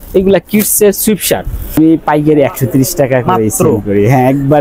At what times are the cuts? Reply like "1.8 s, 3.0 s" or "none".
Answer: 1.8 s